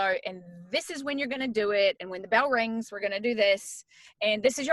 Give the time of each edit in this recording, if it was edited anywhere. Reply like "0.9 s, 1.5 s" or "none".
none